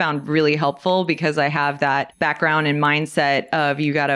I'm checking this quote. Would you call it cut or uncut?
cut